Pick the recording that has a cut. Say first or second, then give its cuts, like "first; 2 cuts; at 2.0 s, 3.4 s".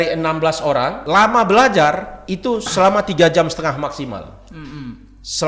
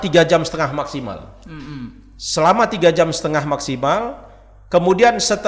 first; 1 cut; at 1.0 s